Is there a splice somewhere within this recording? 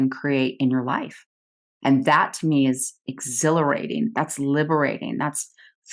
no; 0 cuts

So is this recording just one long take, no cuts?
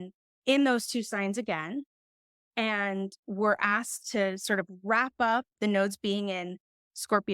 no; 1 cut; at 5.6 s

